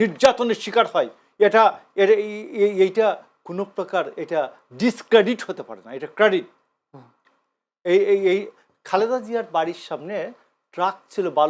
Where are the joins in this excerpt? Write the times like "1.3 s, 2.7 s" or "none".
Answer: none